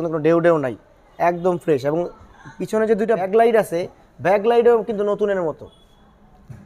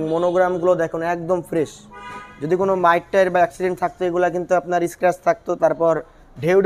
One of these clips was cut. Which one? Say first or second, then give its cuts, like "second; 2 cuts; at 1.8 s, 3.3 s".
first; 1 cut; at 3.2 s